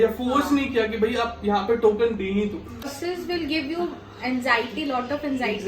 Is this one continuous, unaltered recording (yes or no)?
no